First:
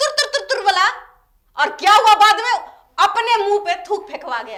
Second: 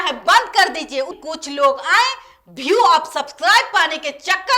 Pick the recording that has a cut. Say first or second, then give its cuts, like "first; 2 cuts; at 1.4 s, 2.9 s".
second; 1 cut; at 1.2 s